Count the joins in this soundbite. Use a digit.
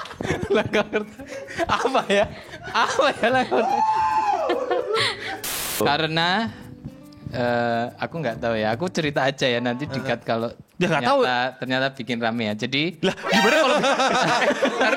1